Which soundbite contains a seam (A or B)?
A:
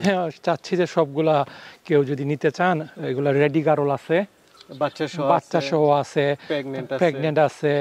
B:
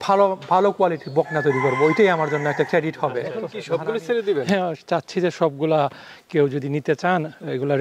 B